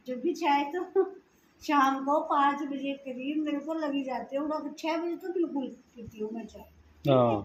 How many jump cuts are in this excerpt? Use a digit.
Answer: 0